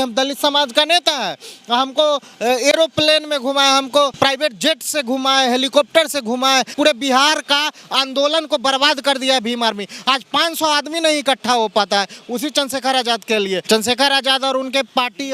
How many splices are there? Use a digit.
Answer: 3